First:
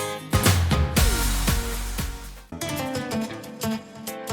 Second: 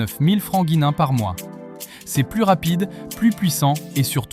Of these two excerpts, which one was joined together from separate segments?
first; 1 cut; at 2.6 s

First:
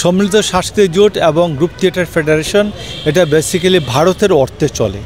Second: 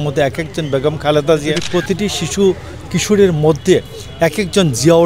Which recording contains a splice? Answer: second; 1 cut; at 1.6 s

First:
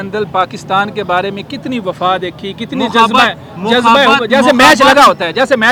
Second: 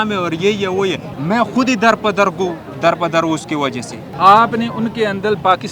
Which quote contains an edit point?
second; 2 cuts; at 1.1 s, 4.0 s

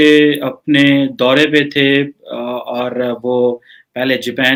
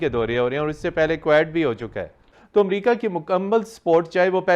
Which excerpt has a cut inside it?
second; 1 cut; at 2.4 s

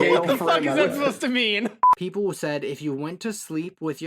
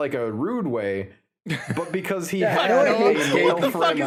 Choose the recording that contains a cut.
first; 1 cut; at 1.8 s

